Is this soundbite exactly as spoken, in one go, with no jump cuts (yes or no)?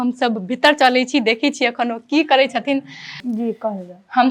no